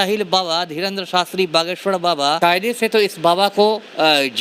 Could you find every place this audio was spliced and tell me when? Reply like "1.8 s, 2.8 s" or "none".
2.4 s